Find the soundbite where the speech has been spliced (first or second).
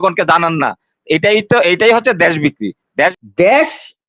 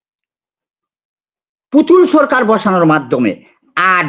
first